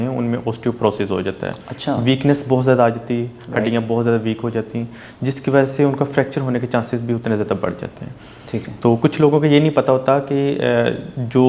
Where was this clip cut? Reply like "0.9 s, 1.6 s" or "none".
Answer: none